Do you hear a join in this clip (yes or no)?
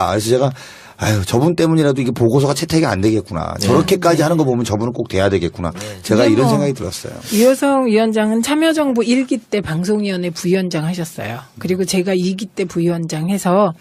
yes